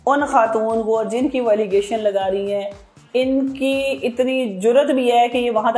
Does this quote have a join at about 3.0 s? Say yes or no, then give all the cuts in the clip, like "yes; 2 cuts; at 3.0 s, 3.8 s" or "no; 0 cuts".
no; 0 cuts